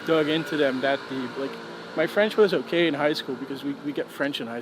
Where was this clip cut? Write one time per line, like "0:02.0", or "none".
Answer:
none